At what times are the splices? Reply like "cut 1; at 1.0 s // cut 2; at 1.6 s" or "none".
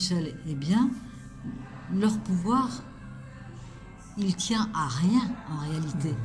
none

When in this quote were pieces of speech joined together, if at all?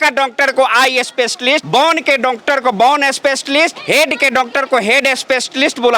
none

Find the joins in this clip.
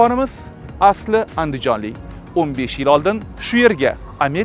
none

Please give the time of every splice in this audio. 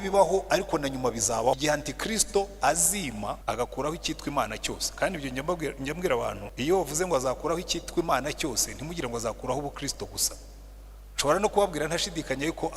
cut 1; at 1.6 s // cut 2; at 3.4 s // cut 3; at 6.5 s

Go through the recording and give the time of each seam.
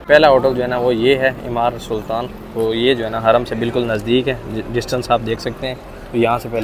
none

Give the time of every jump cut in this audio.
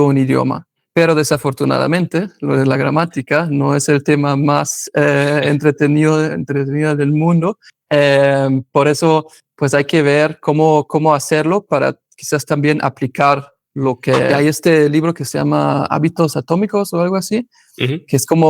cut 1; at 14.3 s

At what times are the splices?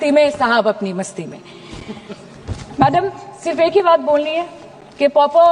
none

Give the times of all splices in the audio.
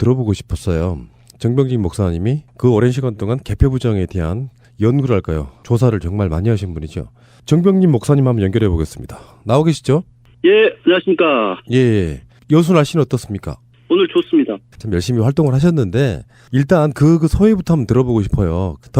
cut 1; at 12.3 s

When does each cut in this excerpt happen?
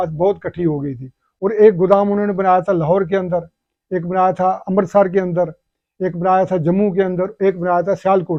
none

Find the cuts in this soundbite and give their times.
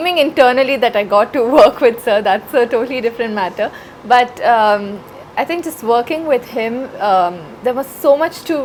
none

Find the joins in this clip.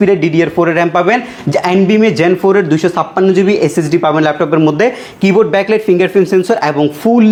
none

